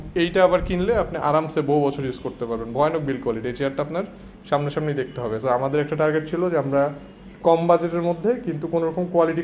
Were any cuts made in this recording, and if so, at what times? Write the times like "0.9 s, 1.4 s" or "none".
none